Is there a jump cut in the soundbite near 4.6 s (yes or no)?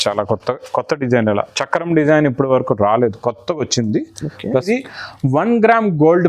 yes